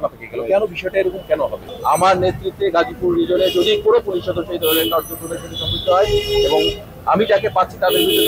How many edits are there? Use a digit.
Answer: 1